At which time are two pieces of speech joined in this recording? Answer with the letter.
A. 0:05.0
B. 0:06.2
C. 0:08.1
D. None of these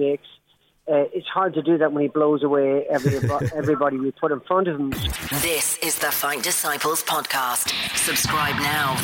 A